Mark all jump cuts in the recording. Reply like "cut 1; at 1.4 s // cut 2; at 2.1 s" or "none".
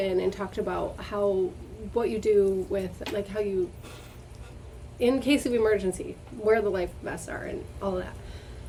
none